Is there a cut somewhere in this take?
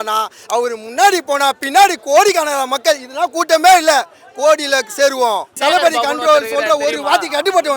yes; 1 cut; at 5.5 s

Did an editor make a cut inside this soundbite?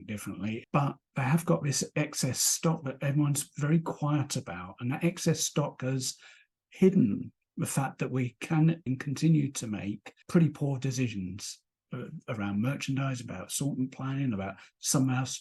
no; 0 cuts

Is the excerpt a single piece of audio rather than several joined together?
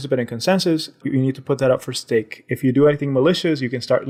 yes; 0 cuts

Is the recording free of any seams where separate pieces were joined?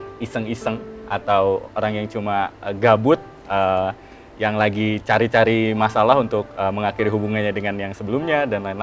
yes; 0 cuts

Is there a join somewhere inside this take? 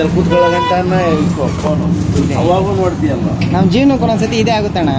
no; 0 cuts

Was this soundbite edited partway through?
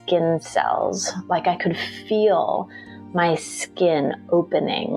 no; 0 cuts

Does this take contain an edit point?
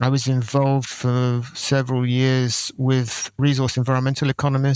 yes; 1 cut; at 1.5 s

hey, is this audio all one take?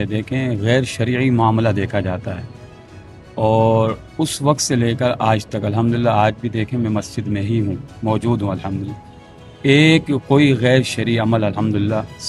yes; 0 cuts

